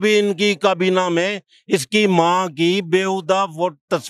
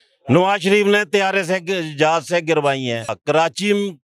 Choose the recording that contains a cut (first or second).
second